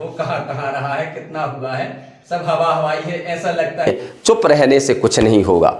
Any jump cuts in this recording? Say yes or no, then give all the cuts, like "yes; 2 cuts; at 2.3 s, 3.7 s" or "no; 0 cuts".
yes; 1 cut; at 3.9 s